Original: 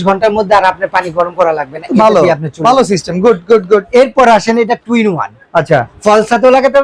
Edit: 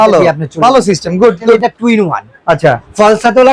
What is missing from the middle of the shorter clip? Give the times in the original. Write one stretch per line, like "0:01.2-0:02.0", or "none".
0:03.6-0:04.7